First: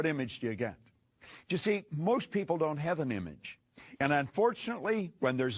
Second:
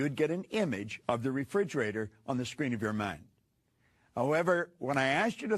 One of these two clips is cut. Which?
second; 1 cut; at 3.4 s

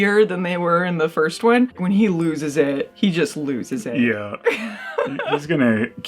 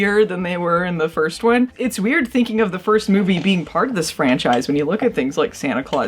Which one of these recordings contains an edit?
second; 1 cut; at 1.7 s

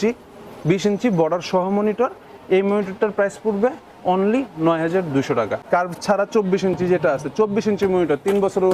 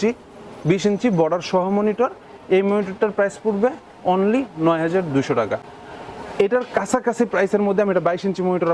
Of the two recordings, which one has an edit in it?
first; 1 cut; at 5.6 s

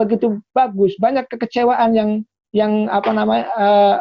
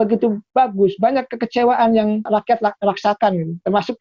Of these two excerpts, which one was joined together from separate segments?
second; 1 cut; at 2.3 s

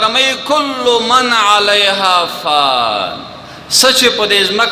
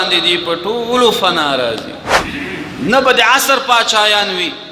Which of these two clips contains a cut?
second; 1 cut; at 2.1 s

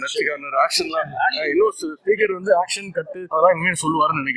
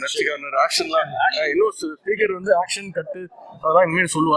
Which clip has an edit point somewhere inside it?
first; 1 cut; at 3.1 s

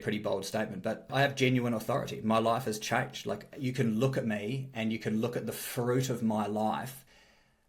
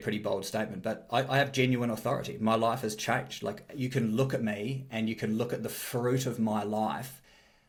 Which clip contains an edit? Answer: first; 1 cut; at 1.1 s

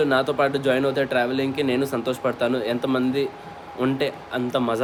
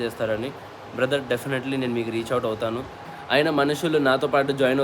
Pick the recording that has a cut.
second; 1 cut; at 3.0 s

